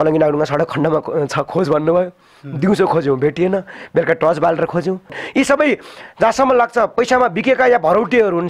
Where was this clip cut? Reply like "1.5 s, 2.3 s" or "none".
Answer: 5.2 s